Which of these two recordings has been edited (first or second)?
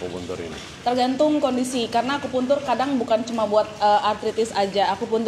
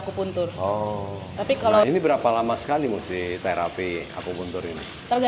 second